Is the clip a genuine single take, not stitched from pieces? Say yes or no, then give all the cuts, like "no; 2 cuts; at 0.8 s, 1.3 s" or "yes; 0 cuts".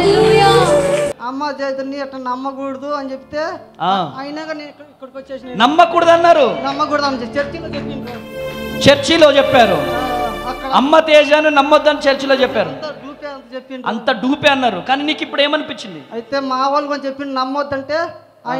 no; 1 cut; at 1.1 s